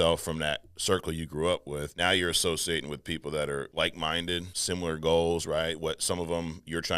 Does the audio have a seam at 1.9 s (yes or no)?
yes